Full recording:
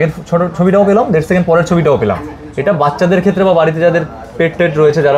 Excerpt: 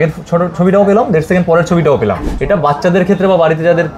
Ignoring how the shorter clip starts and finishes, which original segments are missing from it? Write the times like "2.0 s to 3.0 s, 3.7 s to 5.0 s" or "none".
2.3 s to 2.5 s